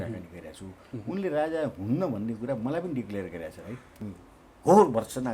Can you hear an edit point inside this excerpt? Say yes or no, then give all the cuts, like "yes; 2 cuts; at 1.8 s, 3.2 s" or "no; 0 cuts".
yes; 1 cut; at 4.0 s